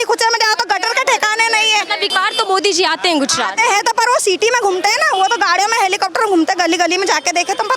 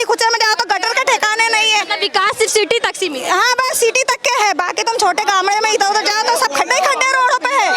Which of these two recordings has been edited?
first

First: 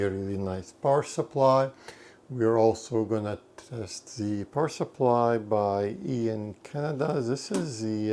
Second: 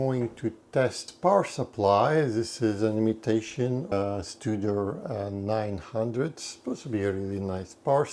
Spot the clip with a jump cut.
second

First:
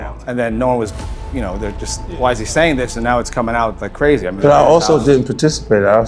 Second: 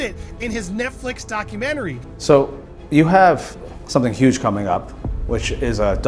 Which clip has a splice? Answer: second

